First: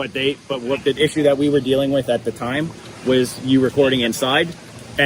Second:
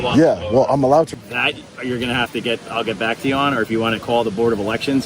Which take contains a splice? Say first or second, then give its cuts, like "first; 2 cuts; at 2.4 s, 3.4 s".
second; 1 cut; at 1.2 s